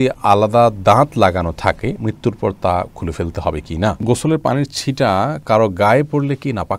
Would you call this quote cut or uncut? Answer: cut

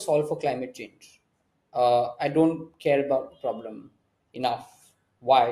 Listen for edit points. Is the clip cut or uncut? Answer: uncut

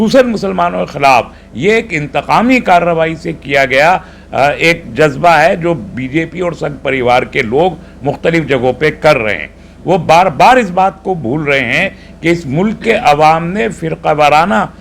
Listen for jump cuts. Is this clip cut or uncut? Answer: uncut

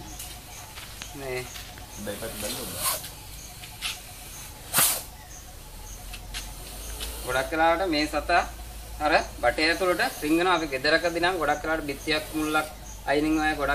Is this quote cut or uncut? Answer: cut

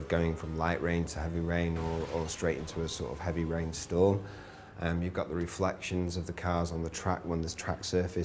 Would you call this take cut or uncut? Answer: cut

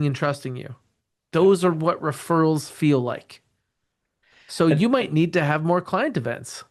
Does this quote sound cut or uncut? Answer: uncut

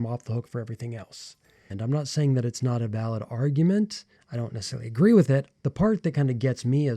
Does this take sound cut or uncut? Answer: cut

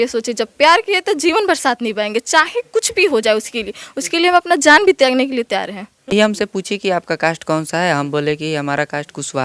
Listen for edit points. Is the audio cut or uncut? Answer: cut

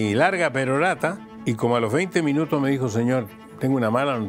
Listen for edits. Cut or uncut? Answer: cut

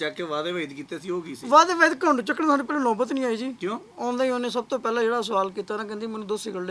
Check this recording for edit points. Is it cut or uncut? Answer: cut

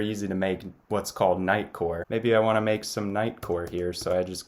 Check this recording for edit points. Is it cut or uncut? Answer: cut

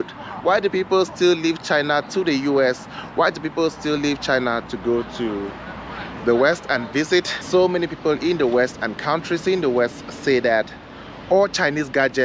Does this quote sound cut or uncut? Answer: cut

